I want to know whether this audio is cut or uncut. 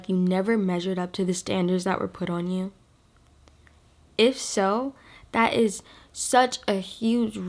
uncut